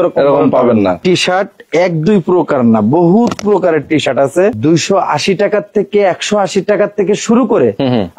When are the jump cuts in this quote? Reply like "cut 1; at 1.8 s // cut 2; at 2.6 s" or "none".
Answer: cut 1; at 1.0 s // cut 2; at 4.6 s